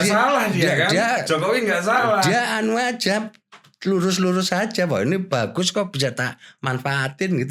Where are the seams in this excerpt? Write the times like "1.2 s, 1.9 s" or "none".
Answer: none